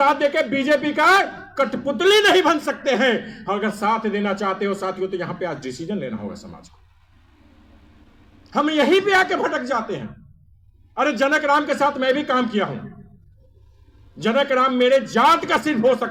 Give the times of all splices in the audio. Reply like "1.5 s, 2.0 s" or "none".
none